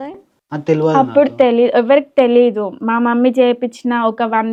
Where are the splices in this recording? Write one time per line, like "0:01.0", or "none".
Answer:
none